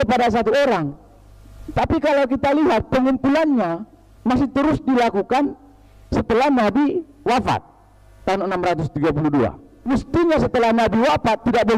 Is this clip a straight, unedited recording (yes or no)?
no